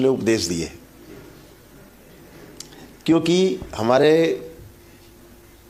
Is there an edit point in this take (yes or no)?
no